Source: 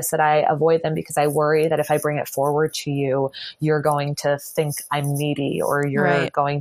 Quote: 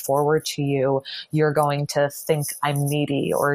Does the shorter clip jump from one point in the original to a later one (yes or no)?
no